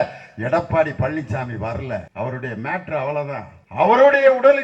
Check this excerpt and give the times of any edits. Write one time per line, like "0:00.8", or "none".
0:02.1
0:03.6